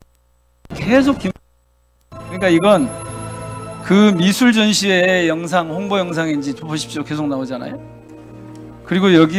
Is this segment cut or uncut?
uncut